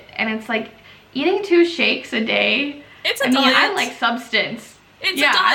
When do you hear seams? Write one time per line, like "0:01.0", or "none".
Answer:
none